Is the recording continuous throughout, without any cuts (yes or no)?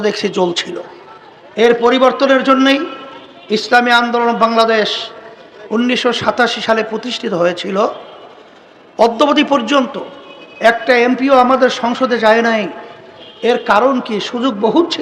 yes